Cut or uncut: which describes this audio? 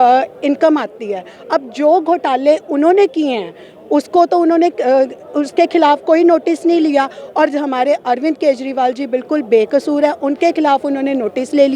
uncut